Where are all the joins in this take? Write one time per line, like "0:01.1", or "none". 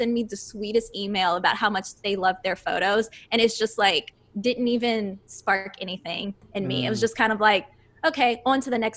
none